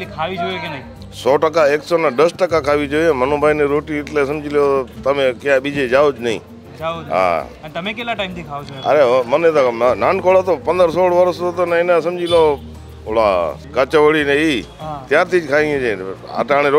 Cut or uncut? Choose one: uncut